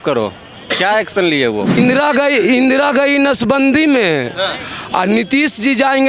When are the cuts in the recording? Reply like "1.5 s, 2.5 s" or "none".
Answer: 1.8 s